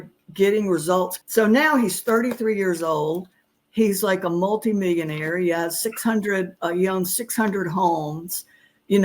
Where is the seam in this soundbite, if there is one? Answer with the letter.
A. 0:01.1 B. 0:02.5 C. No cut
A